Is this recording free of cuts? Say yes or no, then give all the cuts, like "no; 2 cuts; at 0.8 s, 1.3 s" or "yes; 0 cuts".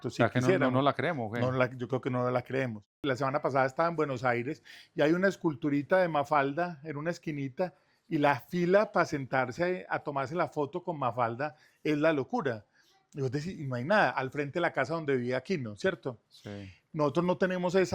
no; 1 cut; at 3.0 s